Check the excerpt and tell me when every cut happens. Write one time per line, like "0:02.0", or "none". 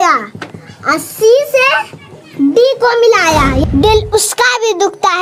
0:03.6